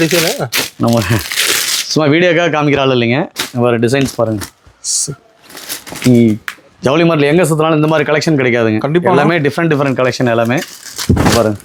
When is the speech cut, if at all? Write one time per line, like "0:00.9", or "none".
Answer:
none